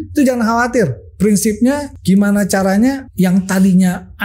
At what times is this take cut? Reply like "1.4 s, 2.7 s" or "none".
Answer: 1.9 s, 3.1 s